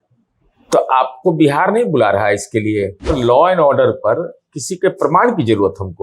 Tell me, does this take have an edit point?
yes; 1 cut; at 3.2 s

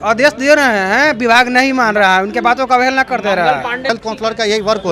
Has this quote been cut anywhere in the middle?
yes; 1 cut; at 3.9 s

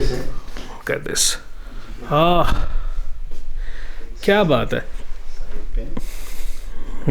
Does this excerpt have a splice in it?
yes; 1 cut; at 1.9 s

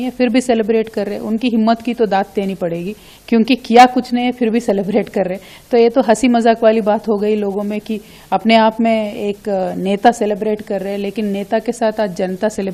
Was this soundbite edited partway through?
no; 0 cuts

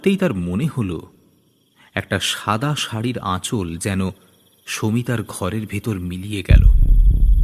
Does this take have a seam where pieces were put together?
yes; 1 cut; at 6.5 s

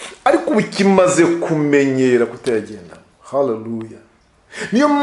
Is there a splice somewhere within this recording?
no; 0 cuts

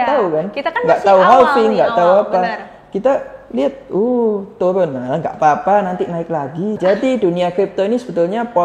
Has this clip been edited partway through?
yes; 1 cut; at 6.8 s

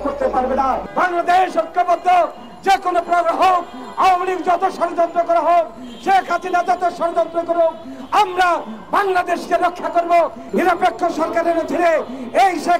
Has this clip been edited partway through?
yes; 2 cuts; at 0.8 s, 10.4 s

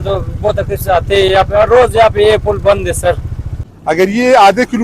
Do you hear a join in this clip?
yes; 1 cut; at 3.7 s

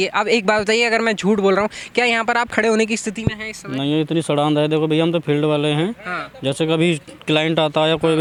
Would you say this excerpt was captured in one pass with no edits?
yes; 0 cuts

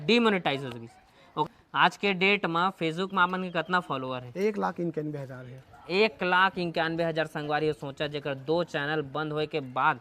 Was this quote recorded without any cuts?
no; 1 cut; at 1.4 s

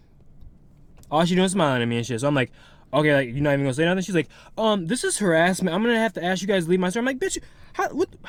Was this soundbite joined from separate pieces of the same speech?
no; 0 cuts

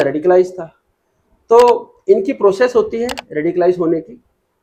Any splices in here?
no; 0 cuts

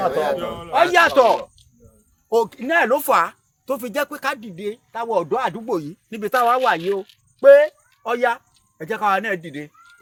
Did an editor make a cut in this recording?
no; 0 cuts

